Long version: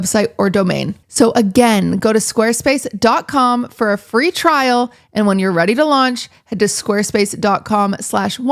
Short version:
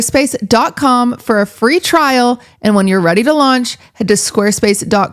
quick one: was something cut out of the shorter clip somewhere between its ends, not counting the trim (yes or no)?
no